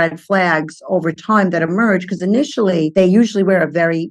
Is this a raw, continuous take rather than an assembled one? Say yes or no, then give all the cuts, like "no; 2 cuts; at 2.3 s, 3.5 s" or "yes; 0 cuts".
no; 1 cut; at 2.9 s